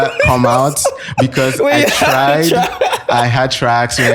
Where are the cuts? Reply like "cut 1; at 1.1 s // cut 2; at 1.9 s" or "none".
none